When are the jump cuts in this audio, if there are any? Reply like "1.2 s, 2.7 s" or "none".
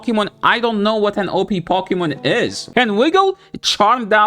2.6 s